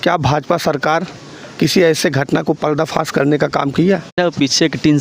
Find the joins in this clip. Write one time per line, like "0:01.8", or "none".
0:04.1